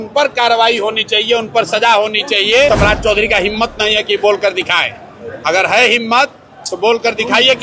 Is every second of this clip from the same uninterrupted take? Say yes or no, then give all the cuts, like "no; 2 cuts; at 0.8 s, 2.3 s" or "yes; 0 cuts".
no; 1 cut; at 2.7 s